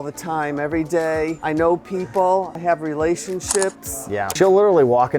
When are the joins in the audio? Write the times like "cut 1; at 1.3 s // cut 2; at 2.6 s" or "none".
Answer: cut 1; at 1.4 s // cut 2; at 2.5 s // cut 3; at 4.3 s